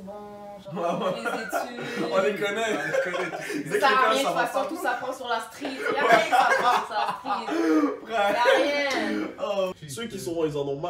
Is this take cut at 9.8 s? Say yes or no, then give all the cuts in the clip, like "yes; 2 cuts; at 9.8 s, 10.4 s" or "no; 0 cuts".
yes; 1 cut; at 9.8 s